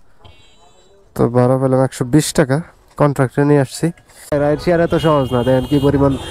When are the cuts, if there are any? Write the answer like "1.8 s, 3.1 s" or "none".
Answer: 4.3 s